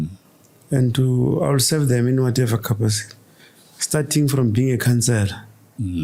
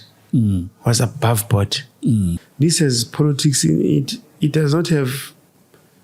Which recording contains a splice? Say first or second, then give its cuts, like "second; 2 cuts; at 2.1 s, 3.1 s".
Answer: second; 1 cut; at 2.4 s